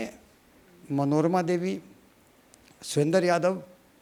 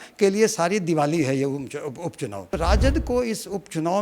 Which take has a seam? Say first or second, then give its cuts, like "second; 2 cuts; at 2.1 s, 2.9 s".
second; 1 cut; at 2.5 s